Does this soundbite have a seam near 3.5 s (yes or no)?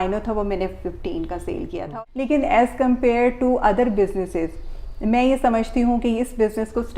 no